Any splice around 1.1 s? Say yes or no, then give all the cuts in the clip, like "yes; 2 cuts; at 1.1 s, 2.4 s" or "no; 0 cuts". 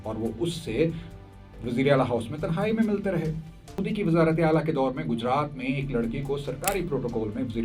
no; 1 cut; at 3.8 s